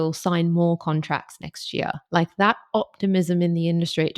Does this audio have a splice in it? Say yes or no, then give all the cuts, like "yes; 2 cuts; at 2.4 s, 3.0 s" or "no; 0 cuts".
no; 0 cuts